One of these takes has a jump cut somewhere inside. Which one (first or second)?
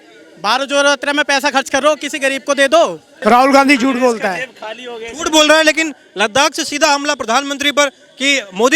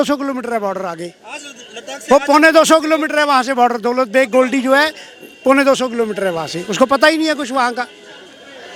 first